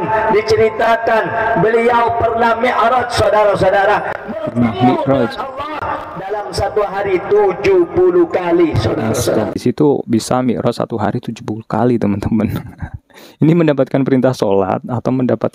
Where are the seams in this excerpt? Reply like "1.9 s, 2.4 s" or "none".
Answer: 9.6 s